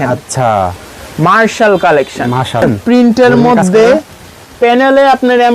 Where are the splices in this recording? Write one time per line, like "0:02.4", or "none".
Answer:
0:02.6